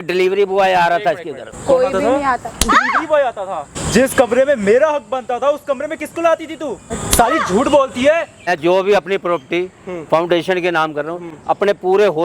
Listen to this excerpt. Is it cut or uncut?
cut